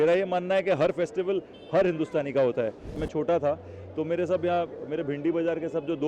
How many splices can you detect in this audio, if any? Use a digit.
1